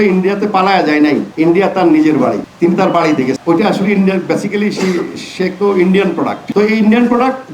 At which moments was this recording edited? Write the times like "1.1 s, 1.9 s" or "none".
3.4 s, 6.4 s